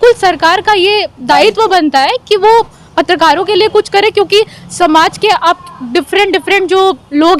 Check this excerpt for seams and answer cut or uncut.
uncut